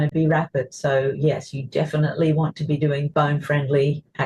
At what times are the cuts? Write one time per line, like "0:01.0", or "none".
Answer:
0:03.1